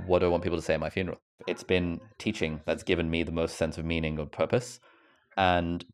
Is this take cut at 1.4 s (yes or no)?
yes